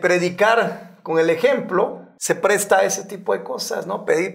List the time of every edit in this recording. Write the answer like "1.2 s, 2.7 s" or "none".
2.1 s

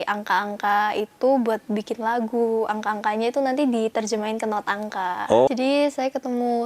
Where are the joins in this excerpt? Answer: 5.5 s

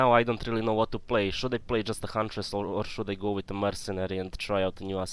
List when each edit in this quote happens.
none

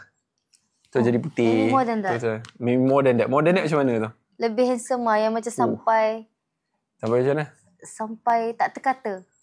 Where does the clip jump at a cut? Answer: none

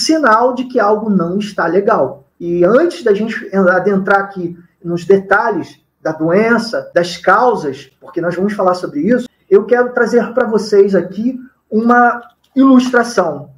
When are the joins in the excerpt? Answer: 2.4 s

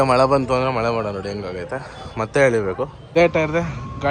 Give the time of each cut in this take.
3.1 s

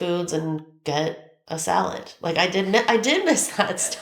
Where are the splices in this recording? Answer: 1.3 s

